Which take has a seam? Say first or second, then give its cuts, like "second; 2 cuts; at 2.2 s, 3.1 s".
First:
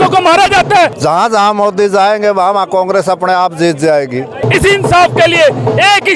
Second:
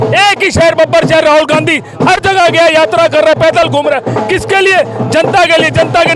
first; 2 cuts; at 0.9 s, 4.5 s